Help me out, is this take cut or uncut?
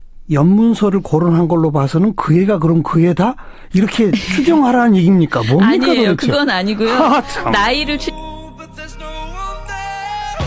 cut